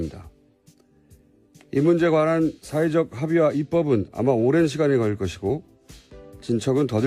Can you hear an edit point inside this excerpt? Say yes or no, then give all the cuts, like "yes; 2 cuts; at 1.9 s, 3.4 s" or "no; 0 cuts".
yes; 1 cut; at 3.1 s